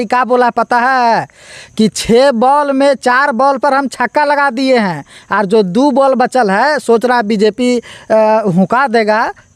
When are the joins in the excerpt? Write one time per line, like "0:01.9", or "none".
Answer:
none